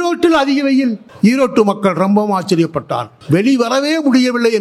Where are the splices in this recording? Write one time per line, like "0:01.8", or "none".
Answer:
0:01.1
0:03.1